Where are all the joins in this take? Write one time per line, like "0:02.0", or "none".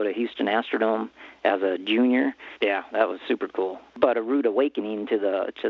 0:03.9